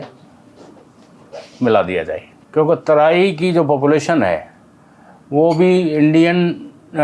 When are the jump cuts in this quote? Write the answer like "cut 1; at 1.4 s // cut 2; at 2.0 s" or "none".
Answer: cut 1; at 2.3 s